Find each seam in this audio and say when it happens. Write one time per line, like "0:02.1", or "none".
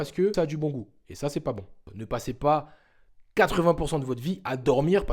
0:01.8